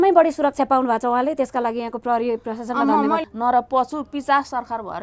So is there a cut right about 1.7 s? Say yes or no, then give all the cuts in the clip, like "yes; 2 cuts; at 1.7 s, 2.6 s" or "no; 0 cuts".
no; 1 cut; at 3.2 s